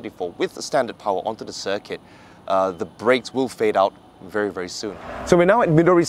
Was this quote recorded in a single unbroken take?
no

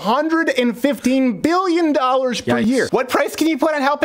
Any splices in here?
yes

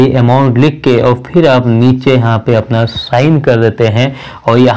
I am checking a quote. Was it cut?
no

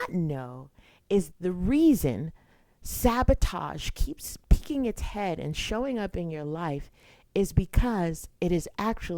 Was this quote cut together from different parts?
yes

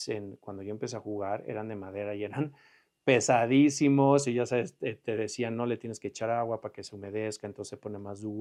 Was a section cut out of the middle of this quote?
no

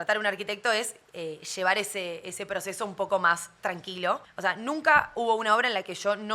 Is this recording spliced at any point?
yes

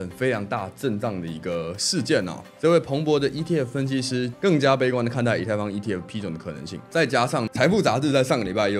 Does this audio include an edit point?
yes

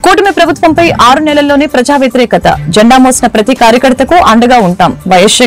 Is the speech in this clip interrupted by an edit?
no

